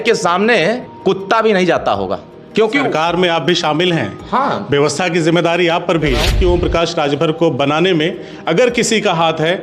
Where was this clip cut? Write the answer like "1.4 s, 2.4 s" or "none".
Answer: 0.9 s, 2.3 s, 6.3 s